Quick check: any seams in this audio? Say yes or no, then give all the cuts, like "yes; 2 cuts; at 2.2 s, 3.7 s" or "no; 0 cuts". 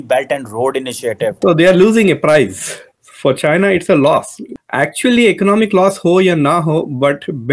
yes; 1 cut; at 1.4 s